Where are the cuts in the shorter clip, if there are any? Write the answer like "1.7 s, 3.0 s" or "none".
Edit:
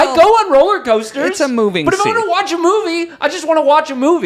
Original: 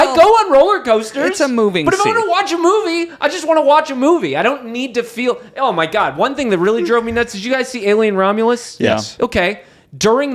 none